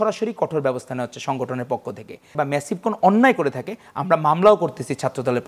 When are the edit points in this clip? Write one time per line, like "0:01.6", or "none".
0:02.3